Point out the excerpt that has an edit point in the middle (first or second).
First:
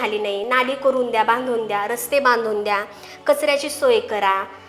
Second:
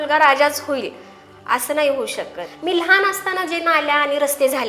second